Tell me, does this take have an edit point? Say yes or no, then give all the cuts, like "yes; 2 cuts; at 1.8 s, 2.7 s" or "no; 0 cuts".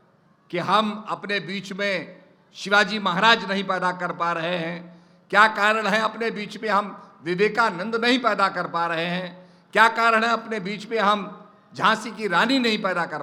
no; 0 cuts